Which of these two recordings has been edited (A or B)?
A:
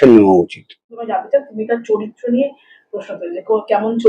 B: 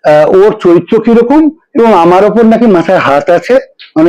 A